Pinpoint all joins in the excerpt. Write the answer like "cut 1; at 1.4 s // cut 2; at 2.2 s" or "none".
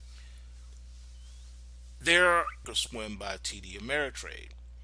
none

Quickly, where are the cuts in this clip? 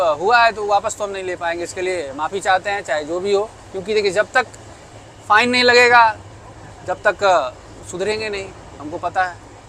none

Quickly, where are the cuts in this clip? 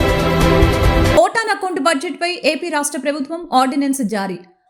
cut 1; at 1.1 s

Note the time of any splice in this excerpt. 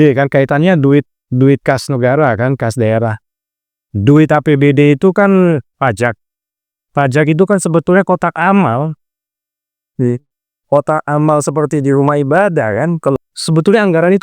cut 1; at 13.2 s

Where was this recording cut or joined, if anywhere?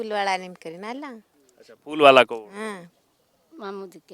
cut 1; at 2.9 s

